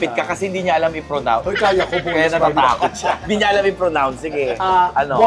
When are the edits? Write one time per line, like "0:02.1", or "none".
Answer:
0:03.2